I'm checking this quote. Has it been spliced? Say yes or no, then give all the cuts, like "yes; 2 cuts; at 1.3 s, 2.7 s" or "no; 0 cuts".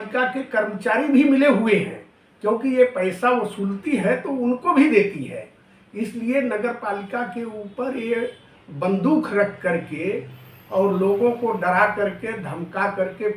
no; 0 cuts